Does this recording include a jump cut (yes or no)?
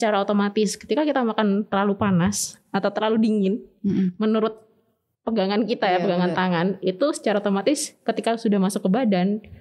no